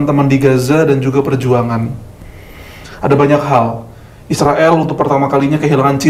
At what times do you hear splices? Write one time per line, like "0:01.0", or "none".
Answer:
none